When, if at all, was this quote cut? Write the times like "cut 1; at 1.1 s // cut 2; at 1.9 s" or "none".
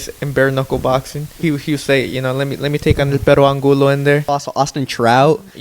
cut 1; at 1.3 s // cut 2; at 4.3 s